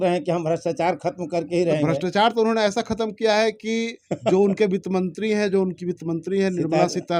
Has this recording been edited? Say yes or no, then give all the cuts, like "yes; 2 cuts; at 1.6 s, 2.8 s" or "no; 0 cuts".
no; 0 cuts